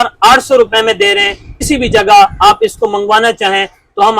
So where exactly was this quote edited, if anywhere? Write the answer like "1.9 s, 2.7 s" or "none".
1.6 s